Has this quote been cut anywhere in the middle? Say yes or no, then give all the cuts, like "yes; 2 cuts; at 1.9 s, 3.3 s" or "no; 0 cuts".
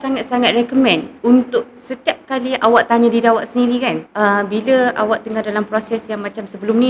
no; 0 cuts